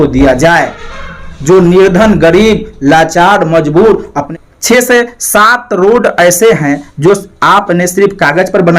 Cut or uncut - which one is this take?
cut